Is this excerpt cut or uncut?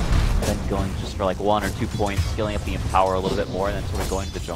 cut